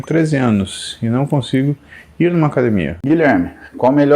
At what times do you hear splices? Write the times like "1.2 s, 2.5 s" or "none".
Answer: 3.0 s